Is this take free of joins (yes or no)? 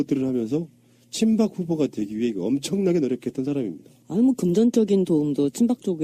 yes